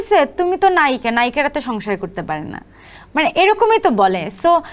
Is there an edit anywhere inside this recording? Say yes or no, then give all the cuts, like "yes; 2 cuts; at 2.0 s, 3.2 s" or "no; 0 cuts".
no; 0 cuts